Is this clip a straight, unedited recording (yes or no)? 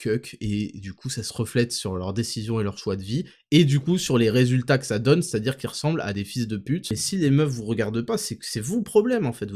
no